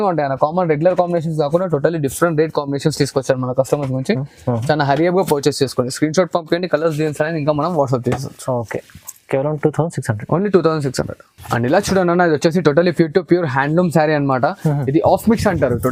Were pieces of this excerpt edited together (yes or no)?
no